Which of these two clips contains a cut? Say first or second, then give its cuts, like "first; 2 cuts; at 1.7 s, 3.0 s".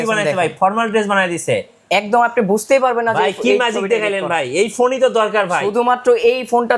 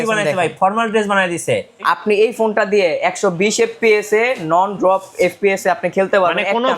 second; 1 cut; at 1.8 s